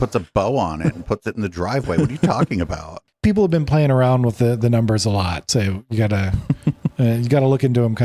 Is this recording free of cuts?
no; 1 cut; at 3.1 s

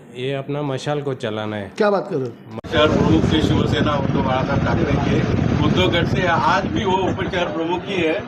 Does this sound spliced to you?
no; 0 cuts

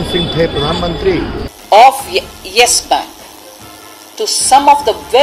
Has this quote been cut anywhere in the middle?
yes; 1 cut; at 1.5 s

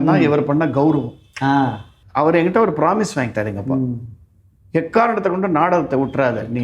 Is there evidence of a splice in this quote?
yes; 1 cut; at 2.0 s

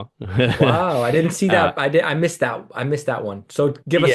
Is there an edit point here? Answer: no; 0 cuts

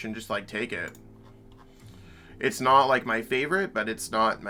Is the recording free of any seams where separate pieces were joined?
yes; 0 cuts

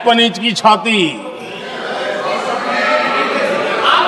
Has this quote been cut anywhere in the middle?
no; 0 cuts

